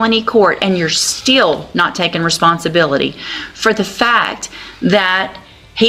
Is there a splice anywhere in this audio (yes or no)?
no